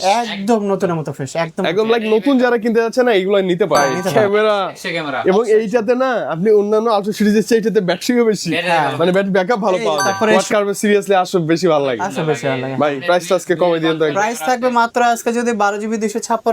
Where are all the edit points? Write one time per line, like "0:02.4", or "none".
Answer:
0:04.0
0:10.3